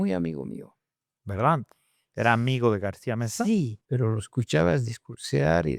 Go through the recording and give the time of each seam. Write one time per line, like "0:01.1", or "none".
0:03.8